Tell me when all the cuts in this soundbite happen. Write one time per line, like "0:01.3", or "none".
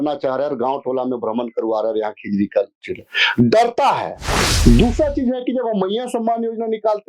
0:04.5